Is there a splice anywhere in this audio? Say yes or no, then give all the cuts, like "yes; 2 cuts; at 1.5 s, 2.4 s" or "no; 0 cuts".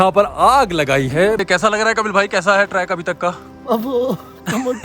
yes; 1 cut; at 1.4 s